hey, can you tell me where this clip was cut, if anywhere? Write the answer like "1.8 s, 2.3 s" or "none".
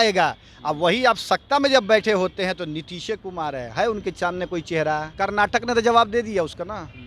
5.1 s